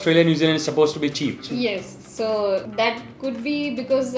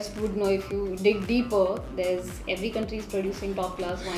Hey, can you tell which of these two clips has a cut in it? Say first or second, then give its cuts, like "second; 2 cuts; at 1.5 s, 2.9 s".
first; 1 cut; at 2.7 s